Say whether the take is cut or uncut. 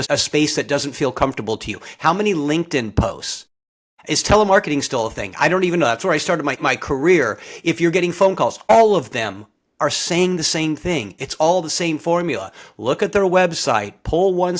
uncut